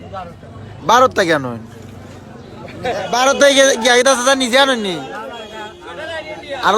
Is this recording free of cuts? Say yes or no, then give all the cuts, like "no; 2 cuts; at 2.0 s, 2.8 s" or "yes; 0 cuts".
no; 1 cut; at 3.1 s